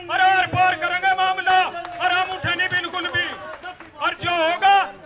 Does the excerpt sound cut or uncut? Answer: uncut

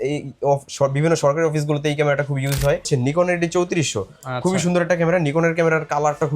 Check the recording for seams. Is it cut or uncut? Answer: cut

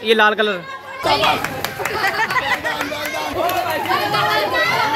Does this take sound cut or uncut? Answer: cut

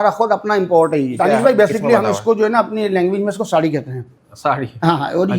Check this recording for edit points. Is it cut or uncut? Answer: cut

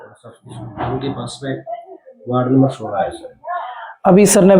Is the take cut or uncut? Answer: uncut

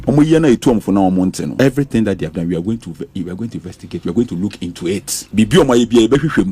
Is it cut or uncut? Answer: cut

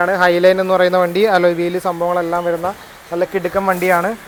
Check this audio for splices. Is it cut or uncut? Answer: uncut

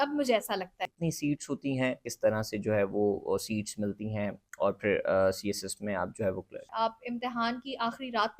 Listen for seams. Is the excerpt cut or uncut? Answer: cut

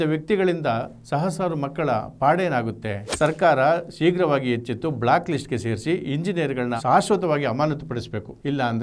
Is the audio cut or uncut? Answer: cut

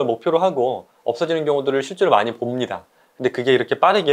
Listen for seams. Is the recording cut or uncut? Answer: uncut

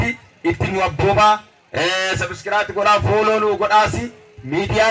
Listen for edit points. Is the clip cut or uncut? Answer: uncut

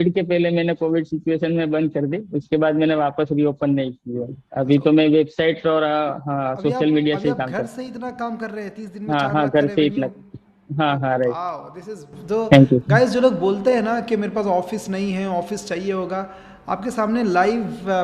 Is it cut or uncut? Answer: uncut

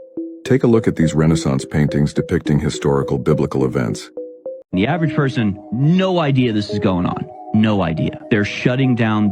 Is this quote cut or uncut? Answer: cut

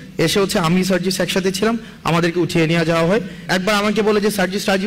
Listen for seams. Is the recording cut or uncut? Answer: cut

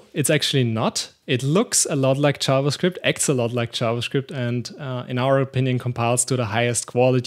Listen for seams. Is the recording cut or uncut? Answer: uncut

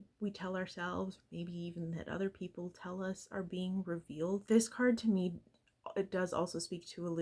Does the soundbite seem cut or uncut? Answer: cut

